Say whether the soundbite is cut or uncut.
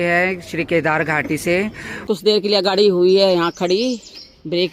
cut